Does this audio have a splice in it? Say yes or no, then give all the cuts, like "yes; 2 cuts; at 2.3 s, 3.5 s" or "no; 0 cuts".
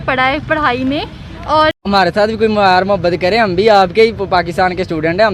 yes; 1 cut; at 1.8 s